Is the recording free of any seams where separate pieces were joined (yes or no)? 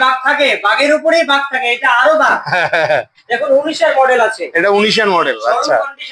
yes